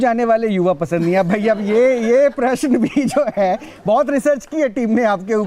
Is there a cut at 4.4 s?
yes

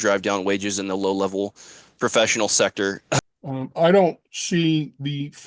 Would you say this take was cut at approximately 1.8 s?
no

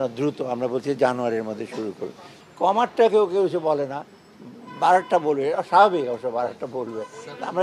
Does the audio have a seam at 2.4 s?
yes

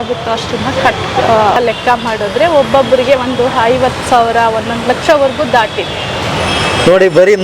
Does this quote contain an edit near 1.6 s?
yes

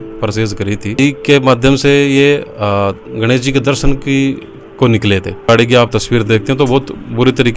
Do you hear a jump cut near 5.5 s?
yes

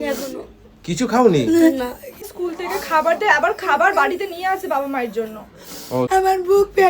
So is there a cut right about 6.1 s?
yes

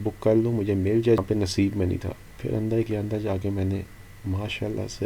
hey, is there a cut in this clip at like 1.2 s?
yes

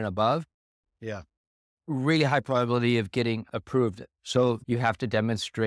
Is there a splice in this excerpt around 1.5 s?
no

